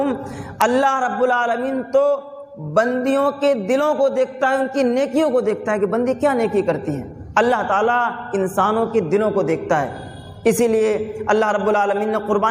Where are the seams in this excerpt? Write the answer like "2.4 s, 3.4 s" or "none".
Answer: none